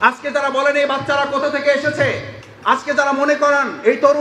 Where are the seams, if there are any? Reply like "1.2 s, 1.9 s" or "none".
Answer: none

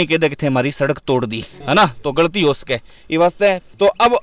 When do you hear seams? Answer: none

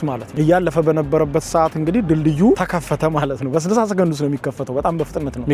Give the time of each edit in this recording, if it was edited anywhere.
none

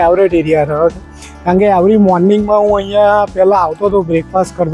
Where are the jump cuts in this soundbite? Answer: none

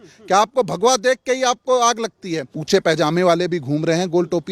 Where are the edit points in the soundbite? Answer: 2.5 s

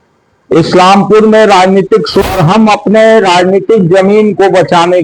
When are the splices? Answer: 2.2 s

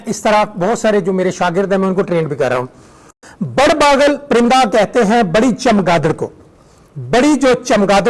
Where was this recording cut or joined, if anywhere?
3.2 s

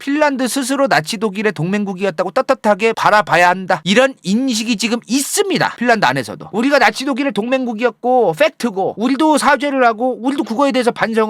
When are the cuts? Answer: 6.4 s

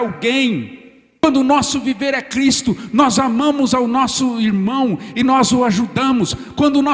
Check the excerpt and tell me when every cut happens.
1.2 s

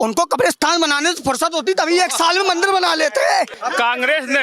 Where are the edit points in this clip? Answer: 3.5 s

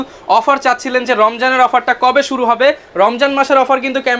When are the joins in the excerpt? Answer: none

